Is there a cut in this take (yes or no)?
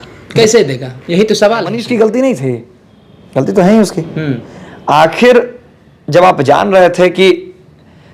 yes